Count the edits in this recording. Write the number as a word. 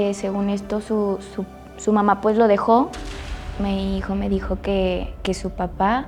zero